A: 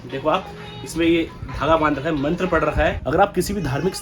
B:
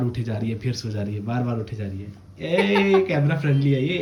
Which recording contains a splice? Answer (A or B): A